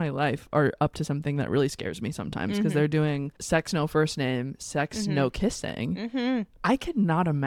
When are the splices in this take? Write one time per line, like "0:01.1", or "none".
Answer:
none